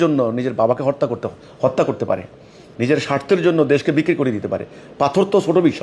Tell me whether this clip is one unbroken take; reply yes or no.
yes